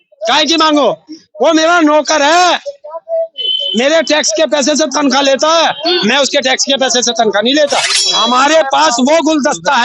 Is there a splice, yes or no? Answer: yes